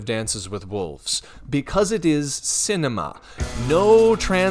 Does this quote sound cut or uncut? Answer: cut